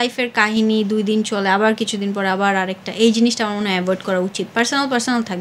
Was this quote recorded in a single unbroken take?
yes; 0 cuts

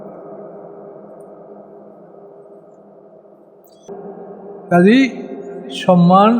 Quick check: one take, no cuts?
no; 1 cut; at 3.9 s

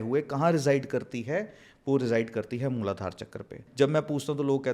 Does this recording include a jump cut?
yes; 1 cut; at 3.6 s

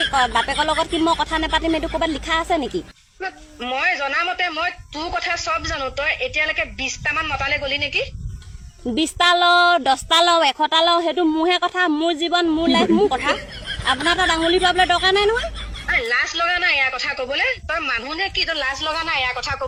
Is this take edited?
no; 0 cuts

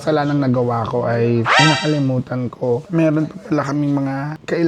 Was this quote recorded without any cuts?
no; 1 cut; at 1.5 s

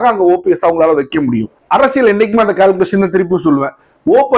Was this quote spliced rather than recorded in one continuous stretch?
yes; 1 cut; at 1.6 s

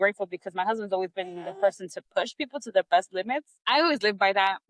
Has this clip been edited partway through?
yes; 1 cut; at 3.5 s

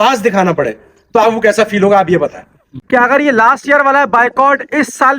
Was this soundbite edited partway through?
yes; 1 cut; at 2.6 s

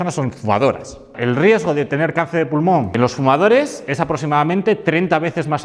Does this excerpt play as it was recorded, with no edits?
no; 2 cuts; at 1.1 s, 2.9 s

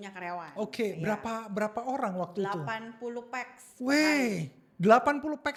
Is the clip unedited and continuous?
yes; 0 cuts

